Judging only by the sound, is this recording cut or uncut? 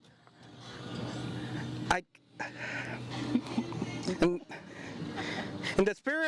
uncut